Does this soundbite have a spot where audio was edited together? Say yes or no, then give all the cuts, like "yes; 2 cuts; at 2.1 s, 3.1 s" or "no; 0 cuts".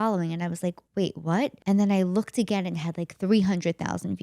yes; 2 cuts; at 0.8 s, 1.6 s